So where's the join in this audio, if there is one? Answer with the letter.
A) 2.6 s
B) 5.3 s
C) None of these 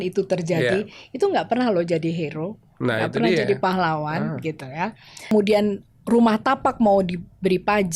B